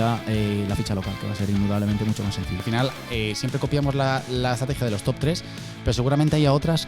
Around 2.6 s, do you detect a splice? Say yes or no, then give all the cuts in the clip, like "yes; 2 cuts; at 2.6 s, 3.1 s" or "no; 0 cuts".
yes; 1 cut; at 2.6 s